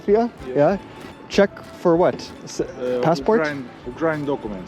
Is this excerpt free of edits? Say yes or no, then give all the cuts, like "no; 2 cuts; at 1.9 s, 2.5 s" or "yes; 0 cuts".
no; 1 cut; at 1.0 s